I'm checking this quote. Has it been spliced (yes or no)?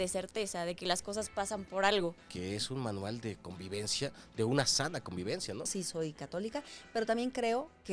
yes